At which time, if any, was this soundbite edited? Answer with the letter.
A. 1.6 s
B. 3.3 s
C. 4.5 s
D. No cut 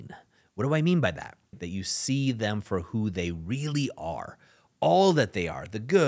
A